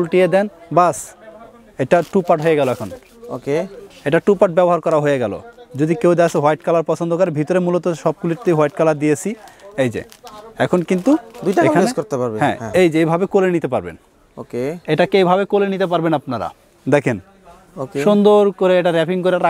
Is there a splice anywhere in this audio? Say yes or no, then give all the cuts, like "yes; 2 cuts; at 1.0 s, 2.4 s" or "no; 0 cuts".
no; 0 cuts